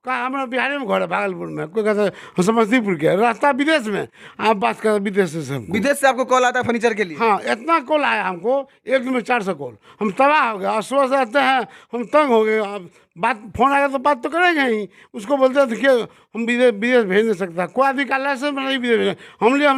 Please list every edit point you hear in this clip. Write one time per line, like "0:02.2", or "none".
none